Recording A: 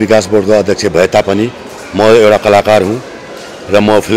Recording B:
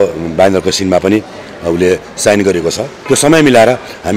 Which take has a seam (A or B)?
B